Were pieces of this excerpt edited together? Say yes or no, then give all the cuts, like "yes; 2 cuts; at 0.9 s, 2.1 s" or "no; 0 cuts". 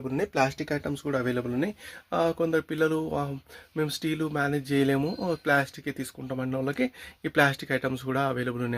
no; 0 cuts